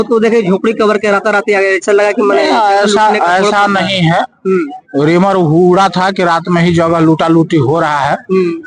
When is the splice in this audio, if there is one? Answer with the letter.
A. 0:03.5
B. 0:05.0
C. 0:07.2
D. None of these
D